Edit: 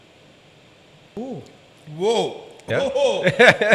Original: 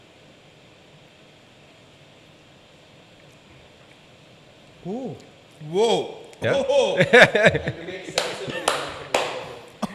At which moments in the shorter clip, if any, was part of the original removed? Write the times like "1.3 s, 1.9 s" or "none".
1.2 s